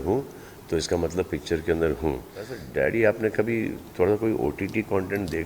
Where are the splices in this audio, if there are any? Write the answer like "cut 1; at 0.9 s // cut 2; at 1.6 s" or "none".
cut 1; at 2.6 s